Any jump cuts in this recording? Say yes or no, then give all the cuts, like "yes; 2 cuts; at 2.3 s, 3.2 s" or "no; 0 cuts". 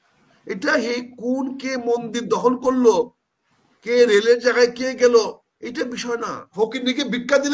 yes; 1 cut; at 6.5 s